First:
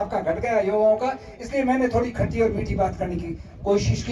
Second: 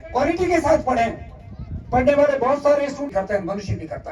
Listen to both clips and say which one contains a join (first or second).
second